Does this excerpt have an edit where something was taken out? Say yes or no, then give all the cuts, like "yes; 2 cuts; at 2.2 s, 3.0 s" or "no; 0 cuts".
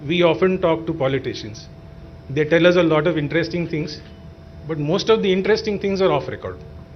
no; 0 cuts